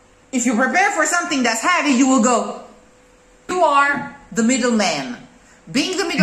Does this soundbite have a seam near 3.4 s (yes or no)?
yes